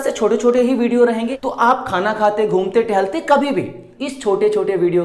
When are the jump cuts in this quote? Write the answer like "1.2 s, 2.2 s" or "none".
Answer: 1.3 s, 3.9 s